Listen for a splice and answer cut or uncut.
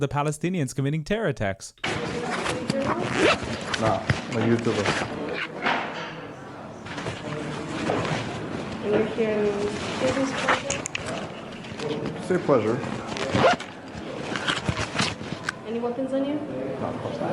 cut